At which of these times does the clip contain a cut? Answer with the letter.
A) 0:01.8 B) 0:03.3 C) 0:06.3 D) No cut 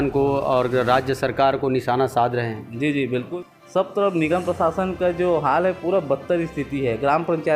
B